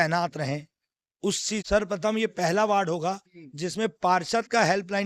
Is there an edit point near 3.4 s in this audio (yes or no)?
no